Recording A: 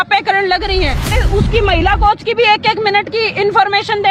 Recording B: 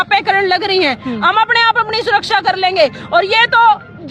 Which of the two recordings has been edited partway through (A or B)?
A